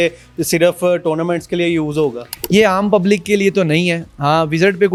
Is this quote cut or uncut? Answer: uncut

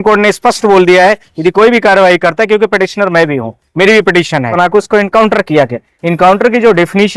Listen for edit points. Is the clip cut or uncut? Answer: cut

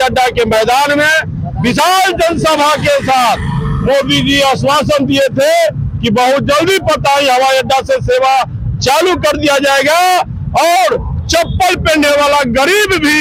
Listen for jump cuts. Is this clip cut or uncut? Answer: uncut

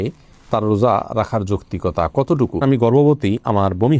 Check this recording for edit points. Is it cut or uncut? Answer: cut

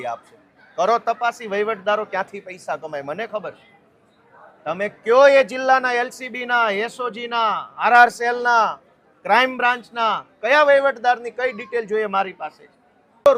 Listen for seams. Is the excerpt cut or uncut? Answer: uncut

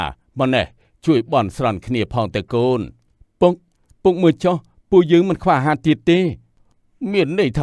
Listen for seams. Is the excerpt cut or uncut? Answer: uncut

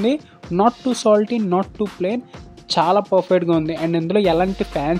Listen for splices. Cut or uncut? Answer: uncut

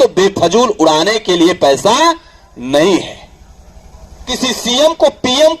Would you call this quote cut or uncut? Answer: cut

